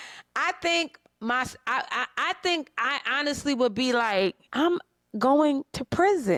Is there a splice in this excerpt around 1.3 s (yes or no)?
no